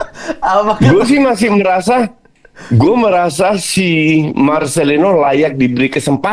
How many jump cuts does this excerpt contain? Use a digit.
0